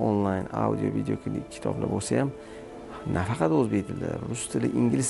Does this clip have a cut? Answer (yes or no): no